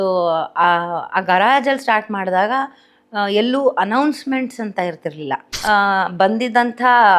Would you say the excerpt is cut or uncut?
cut